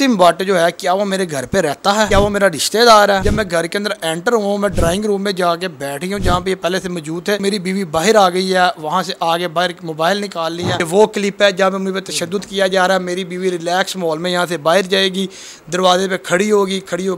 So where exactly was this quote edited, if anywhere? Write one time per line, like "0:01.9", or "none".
0:02.1
0:03.2
0:07.4
0:10.8

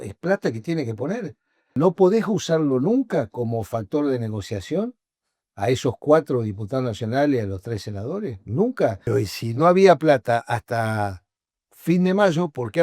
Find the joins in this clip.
0:01.8
0:09.1

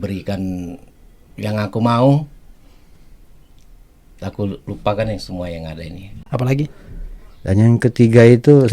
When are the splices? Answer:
0:06.2

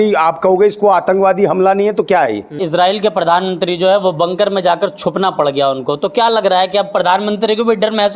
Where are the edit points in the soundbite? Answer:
0:02.6

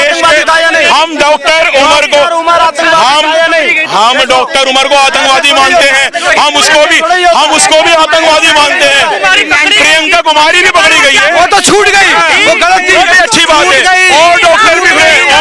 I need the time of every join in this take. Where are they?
none

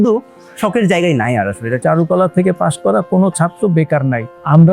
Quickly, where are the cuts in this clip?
0:01.8

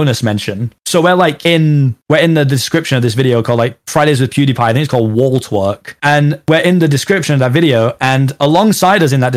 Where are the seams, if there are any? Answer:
none

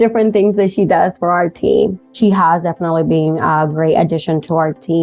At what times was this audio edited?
0:02.1

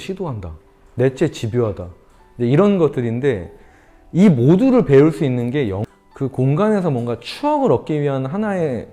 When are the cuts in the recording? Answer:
0:05.8

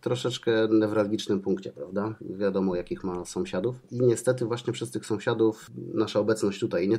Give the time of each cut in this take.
0:02.2
0:03.8
0:05.6

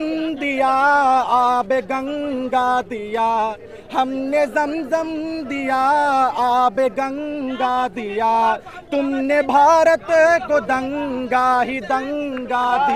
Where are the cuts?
none

